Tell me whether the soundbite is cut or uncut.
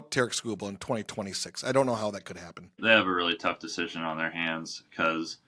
cut